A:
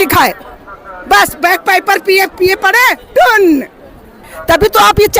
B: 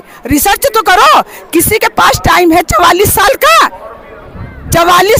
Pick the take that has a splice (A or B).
A